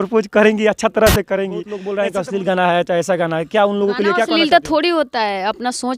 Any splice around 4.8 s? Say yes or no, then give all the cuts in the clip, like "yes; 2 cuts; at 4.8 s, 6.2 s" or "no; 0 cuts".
no; 1 cut; at 1.8 s